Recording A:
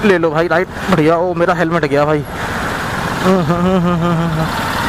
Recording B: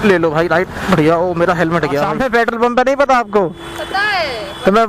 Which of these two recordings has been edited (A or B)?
B